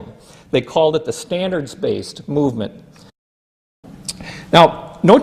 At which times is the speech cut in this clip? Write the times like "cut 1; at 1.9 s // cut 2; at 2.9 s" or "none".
cut 1; at 3.5 s